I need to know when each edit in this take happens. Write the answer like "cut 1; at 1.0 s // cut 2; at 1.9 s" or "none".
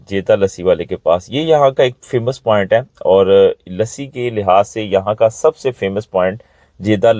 none

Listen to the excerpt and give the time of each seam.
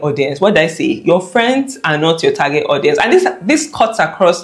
none

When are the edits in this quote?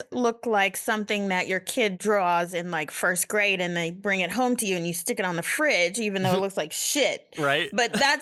none

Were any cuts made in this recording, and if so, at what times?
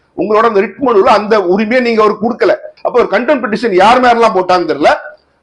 cut 1; at 2.7 s

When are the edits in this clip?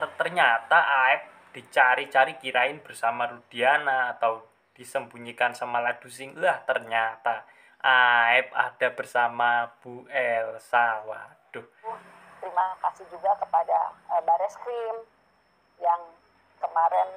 cut 1; at 12.0 s

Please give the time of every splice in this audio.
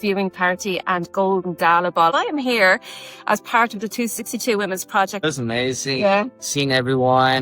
cut 1; at 2.1 s // cut 2; at 5.2 s

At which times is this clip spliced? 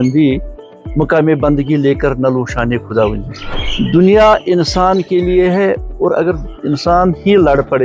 cut 1; at 3.6 s

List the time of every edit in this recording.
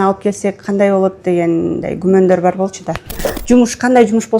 cut 1; at 3.3 s

